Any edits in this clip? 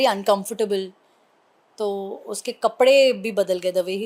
no; 0 cuts

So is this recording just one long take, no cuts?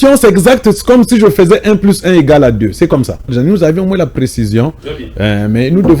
no; 1 cut; at 3.3 s

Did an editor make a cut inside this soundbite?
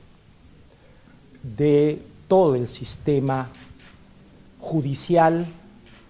yes; 1 cut; at 2.4 s

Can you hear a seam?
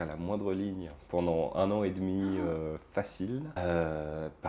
no; 0 cuts

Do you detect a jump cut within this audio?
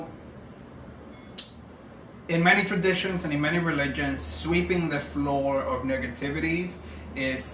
yes; 1 cut; at 1.3 s

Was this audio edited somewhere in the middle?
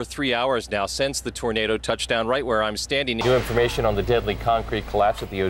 yes; 1 cut; at 3.2 s

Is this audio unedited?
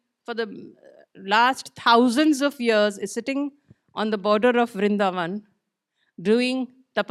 yes; 0 cuts

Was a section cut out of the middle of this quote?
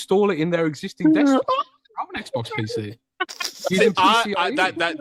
no; 0 cuts

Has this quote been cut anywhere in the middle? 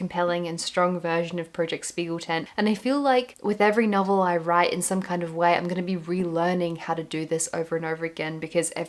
no; 0 cuts

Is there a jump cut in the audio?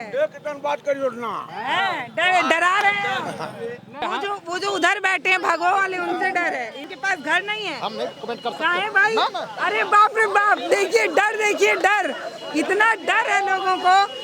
yes; 2 cuts; at 4.0 s, 6.8 s

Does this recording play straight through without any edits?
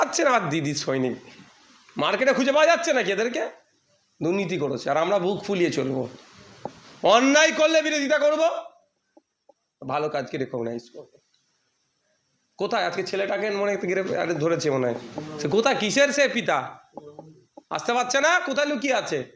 yes; 0 cuts

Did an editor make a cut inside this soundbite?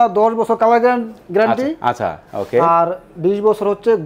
no; 0 cuts

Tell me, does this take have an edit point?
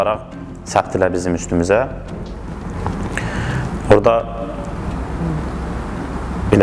no; 0 cuts

